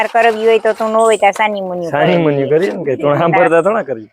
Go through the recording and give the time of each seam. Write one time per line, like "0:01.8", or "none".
none